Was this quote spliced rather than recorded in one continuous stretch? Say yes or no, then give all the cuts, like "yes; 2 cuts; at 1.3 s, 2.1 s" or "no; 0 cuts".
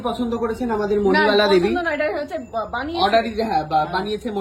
no; 0 cuts